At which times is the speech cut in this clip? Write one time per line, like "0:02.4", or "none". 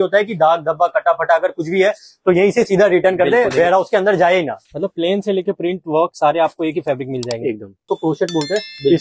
0:04.6
0:07.9